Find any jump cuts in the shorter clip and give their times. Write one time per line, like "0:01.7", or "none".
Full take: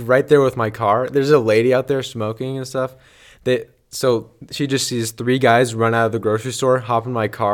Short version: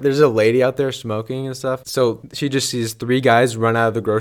0:02.2